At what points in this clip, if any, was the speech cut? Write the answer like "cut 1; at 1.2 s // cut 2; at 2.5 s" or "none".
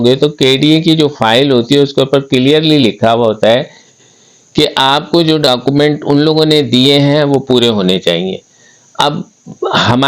none